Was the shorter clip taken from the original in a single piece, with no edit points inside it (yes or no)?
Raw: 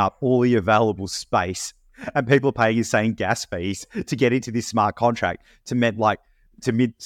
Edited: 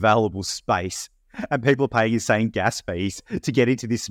yes